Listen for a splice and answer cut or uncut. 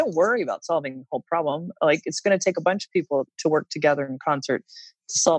cut